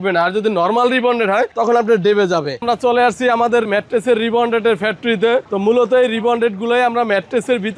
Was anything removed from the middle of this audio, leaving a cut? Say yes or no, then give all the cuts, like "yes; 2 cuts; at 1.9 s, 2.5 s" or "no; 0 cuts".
yes; 3 cuts; at 2.5 s, 3.7 s, 5.5 s